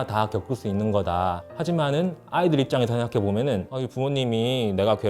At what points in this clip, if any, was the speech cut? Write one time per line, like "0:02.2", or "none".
0:01.4
0:03.7